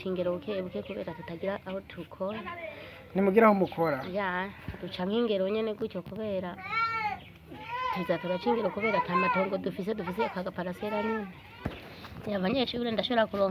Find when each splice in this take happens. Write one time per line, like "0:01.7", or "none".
0:11.6